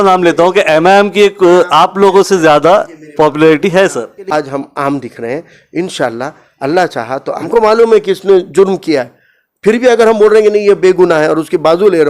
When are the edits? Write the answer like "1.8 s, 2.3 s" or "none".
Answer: 4.3 s, 7.3 s